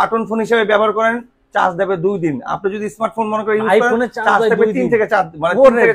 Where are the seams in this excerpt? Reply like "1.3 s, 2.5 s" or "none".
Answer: none